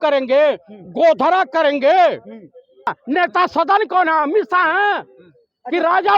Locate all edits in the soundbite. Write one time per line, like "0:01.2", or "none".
0:02.9